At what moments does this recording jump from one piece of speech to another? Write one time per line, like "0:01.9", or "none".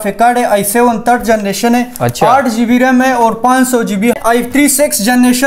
0:04.1